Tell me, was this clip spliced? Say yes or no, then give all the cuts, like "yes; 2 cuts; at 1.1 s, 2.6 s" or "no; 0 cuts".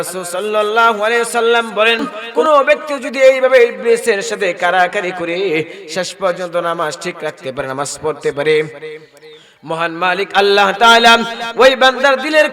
yes; 1 cut; at 2.4 s